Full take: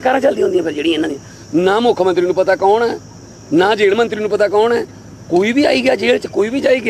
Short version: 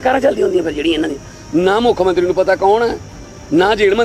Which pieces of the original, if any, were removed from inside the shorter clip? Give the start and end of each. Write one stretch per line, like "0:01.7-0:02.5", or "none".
none